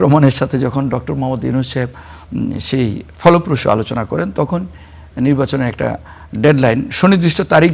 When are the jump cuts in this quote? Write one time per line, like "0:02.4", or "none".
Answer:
none